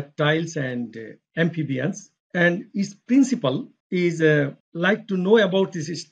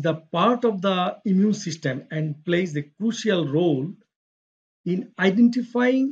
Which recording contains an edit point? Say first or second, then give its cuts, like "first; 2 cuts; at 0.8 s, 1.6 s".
first; 3 cuts; at 2.1 s, 3.7 s, 4.6 s